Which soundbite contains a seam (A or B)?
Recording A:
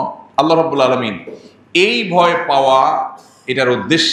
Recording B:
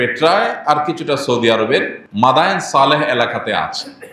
B